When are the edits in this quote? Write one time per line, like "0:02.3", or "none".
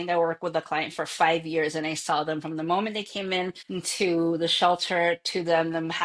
0:03.6